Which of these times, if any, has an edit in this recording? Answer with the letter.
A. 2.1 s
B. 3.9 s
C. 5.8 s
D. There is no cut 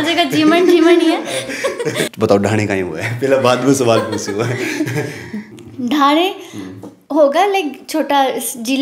A